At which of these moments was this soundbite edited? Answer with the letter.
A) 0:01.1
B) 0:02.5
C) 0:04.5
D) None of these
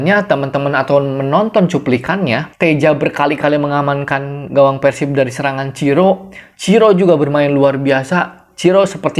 B